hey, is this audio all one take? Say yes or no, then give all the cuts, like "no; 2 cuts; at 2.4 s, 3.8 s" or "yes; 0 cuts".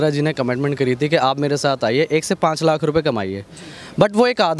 yes; 0 cuts